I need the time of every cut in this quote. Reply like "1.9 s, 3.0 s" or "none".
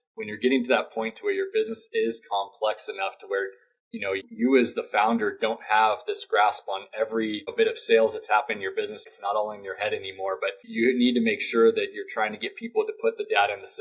4.2 s, 7.5 s, 9.1 s, 10.7 s